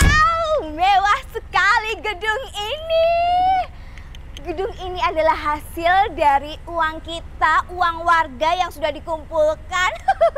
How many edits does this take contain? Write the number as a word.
zero